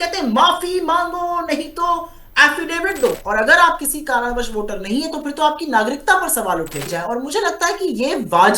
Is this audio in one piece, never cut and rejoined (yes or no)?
no